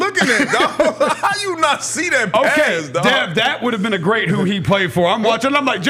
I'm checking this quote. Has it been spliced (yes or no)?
no